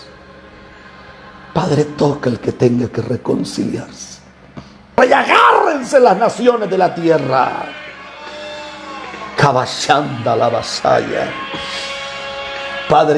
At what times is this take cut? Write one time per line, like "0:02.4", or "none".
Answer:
0:05.0